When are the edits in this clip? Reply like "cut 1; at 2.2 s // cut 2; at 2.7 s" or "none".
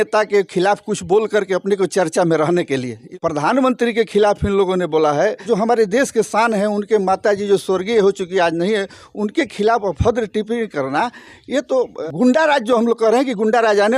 cut 1; at 3.1 s // cut 2; at 5.4 s // cut 3; at 12.0 s